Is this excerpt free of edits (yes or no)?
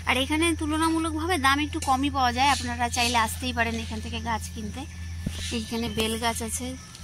yes